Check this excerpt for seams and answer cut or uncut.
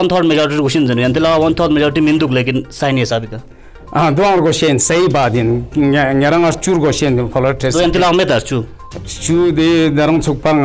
uncut